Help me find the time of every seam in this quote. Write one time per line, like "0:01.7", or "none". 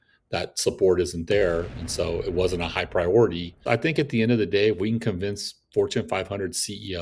0:03.6